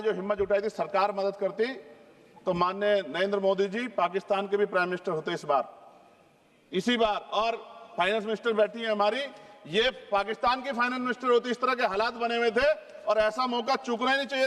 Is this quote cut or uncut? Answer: uncut